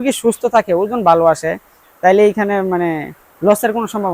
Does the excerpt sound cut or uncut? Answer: uncut